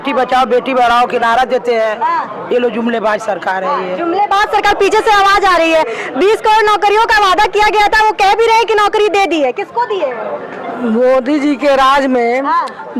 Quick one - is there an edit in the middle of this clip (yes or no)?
no